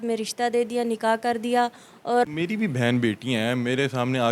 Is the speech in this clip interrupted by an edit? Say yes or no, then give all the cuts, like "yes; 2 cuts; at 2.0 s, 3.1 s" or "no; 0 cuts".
yes; 1 cut; at 2.2 s